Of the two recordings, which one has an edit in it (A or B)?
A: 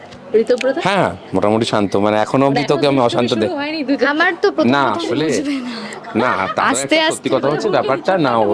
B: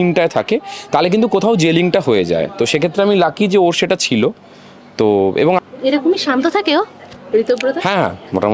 B